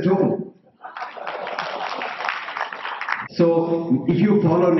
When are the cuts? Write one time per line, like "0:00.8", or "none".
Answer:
0:03.2